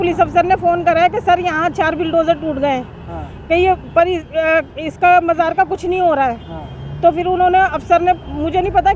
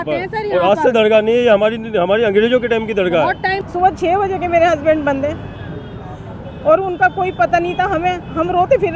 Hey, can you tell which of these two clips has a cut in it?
second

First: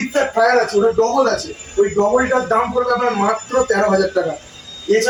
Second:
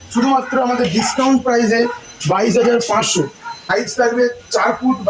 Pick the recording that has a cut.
second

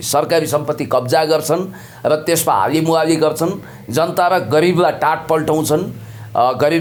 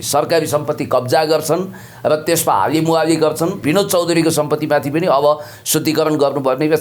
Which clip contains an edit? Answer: second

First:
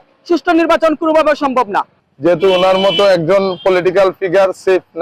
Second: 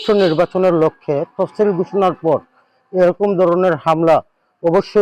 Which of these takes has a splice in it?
first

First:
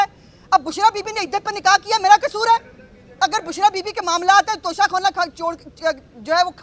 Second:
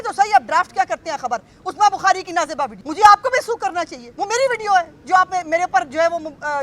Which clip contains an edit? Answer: second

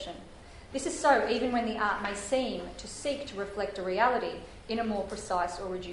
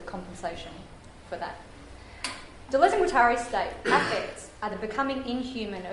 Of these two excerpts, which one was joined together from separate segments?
first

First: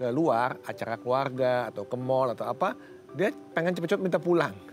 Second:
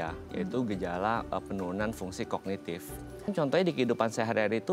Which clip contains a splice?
second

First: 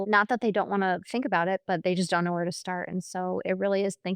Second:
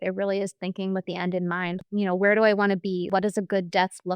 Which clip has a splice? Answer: second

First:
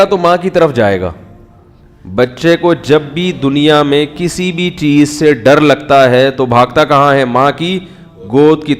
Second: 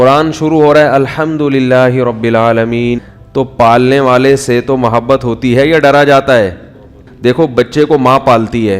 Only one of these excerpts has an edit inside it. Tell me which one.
second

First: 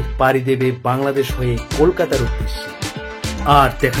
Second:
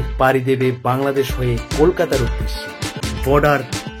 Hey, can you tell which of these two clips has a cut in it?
second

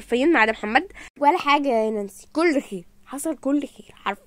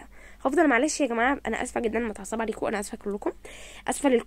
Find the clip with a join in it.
first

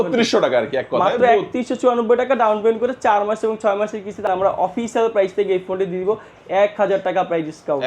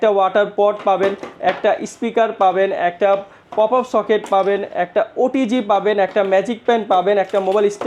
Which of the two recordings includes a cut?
first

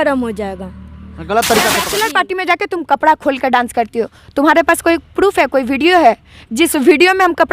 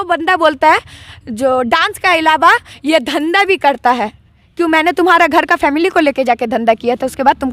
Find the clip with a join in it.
first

